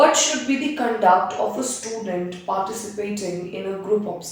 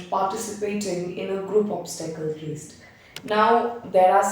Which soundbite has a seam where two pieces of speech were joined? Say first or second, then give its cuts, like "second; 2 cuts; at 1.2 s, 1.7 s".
second; 1 cut; at 3.0 s